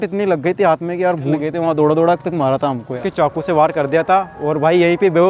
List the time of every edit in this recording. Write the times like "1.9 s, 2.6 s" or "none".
1.3 s, 3.0 s